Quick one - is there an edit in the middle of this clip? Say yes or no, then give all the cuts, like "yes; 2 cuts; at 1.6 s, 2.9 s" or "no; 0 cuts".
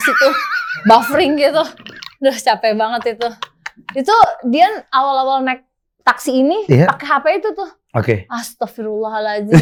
no; 0 cuts